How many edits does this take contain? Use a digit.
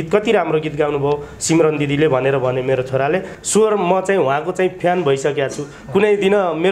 1